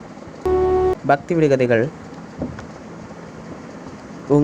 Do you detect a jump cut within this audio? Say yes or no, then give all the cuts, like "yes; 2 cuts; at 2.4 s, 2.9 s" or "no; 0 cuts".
yes; 1 cut; at 0.9 s